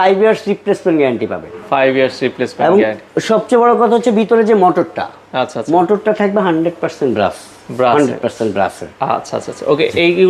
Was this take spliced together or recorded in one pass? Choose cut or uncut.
uncut